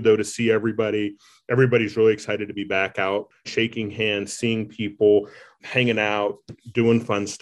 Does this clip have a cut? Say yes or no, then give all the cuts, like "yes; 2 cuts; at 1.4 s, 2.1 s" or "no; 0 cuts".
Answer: yes; 2 cuts; at 3.5 s, 5.6 s